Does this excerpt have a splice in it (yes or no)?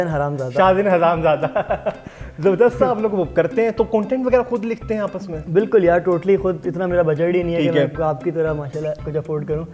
no